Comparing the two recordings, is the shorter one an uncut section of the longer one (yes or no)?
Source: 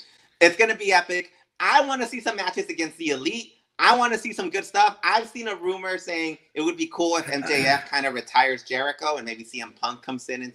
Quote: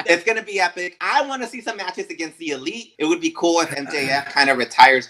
no